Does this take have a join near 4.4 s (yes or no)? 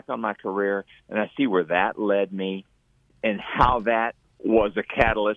yes